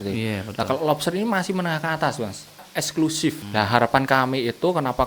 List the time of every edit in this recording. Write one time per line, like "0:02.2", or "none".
0:02.6
0:03.4

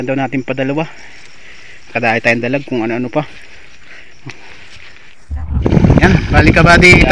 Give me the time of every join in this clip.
0:05.4

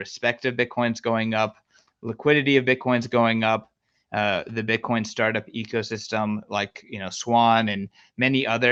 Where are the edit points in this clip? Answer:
none

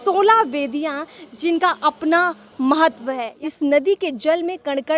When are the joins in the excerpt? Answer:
0:03.3

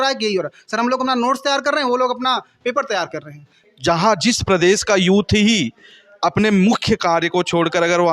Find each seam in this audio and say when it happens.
0:03.6

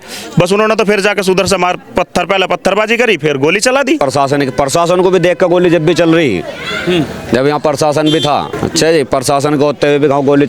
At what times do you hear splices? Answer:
0:04.0
0:08.5

